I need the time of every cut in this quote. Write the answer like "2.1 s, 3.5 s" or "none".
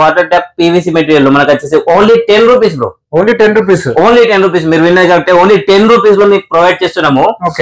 none